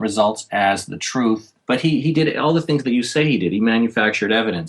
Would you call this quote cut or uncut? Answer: cut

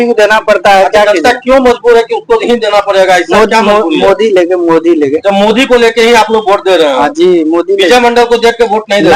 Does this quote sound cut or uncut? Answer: uncut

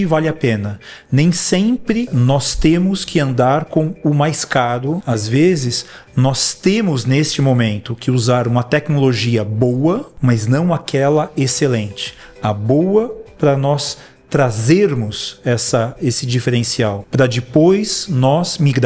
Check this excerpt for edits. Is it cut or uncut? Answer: cut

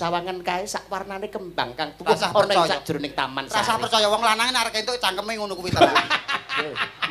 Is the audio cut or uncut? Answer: uncut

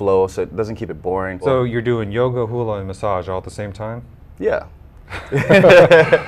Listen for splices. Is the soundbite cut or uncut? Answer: cut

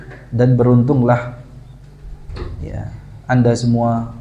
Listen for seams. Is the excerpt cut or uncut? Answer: uncut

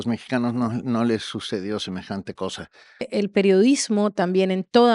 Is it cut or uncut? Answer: cut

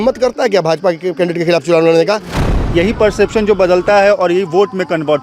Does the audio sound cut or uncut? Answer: cut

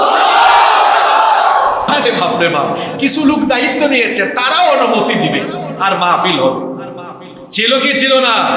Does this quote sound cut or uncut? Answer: cut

